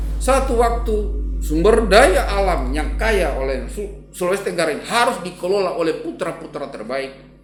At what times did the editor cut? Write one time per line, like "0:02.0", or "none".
none